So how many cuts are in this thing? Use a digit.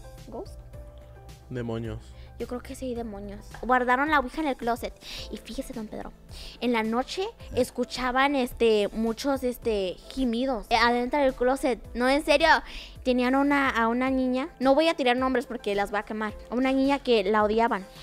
2